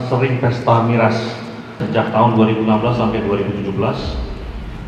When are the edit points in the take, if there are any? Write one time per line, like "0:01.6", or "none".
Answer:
0:01.8